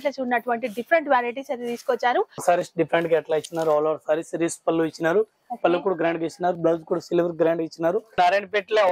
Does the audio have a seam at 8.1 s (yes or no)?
yes